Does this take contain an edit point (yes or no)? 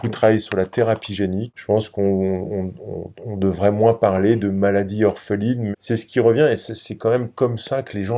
yes